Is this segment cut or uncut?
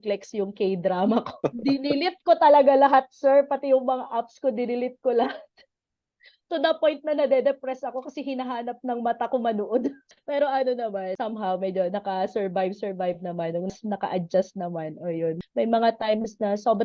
cut